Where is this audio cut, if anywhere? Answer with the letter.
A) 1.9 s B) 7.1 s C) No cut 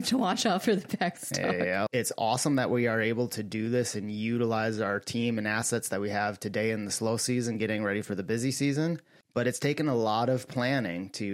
A